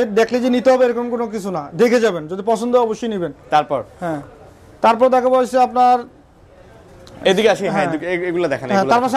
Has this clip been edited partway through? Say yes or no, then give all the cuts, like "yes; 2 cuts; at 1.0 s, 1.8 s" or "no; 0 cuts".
no; 0 cuts